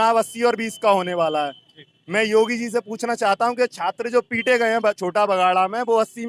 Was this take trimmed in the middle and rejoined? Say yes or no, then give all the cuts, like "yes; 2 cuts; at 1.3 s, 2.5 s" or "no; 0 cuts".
no; 0 cuts